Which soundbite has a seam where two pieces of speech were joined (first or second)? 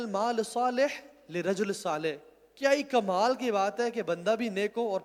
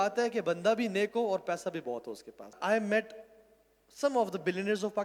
second